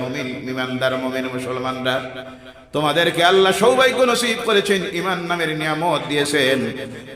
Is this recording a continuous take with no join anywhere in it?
yes; 0 cuts

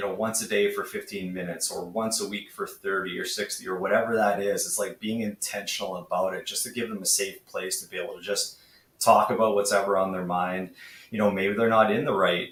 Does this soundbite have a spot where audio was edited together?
no; 0 cuts

